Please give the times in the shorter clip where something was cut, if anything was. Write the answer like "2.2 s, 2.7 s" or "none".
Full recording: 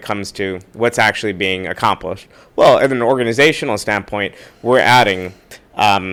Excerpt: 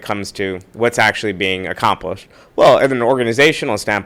none